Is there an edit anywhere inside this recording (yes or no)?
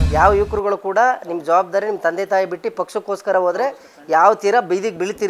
no